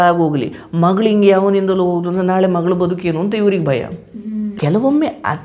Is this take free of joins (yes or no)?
no